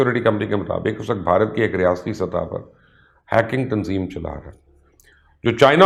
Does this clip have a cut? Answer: no; 0 cuts

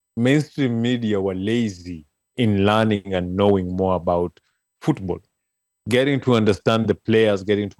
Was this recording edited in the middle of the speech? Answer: no; 0 cuts

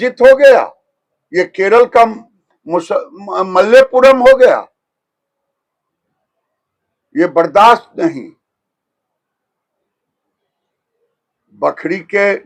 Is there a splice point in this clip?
no; 0 cuts

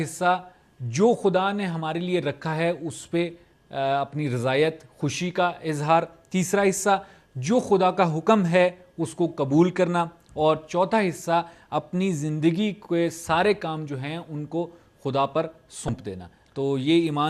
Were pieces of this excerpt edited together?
yes; 1 cut; at 15.6 s

